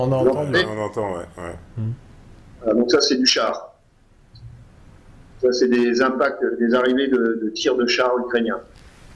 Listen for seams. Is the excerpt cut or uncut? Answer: uncut